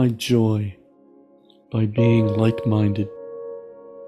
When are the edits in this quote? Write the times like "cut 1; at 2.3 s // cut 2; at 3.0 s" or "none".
none